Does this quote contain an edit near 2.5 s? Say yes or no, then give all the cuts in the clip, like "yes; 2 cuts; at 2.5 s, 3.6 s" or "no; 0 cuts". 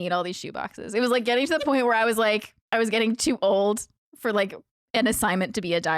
yes; 1 cut; at 2.5 s